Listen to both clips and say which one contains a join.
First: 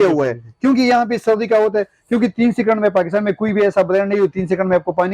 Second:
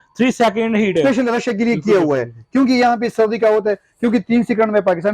second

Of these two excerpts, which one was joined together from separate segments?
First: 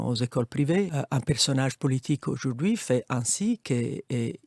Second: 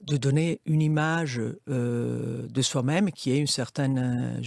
first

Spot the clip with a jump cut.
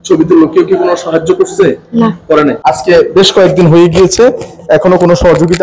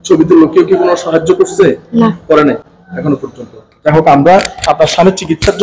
first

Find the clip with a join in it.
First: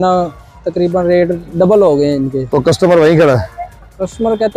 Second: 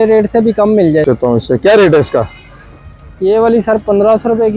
second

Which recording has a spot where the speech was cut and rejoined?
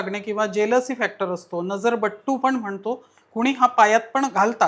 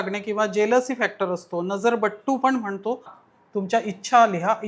second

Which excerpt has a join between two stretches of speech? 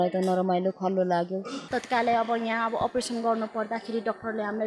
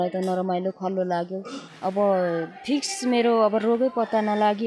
first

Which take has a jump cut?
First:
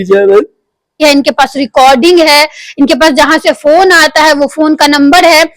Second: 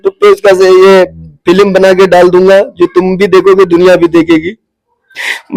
first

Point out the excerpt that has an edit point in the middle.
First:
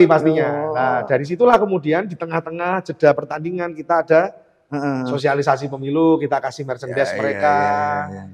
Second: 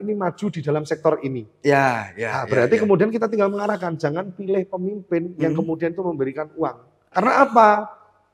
second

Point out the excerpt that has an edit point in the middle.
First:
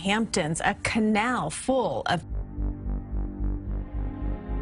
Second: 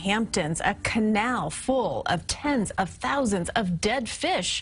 second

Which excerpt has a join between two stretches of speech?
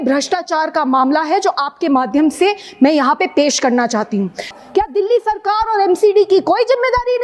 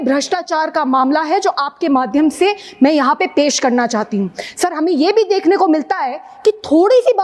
first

